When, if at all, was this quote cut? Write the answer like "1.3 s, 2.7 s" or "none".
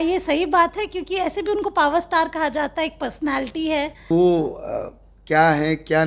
4.0 s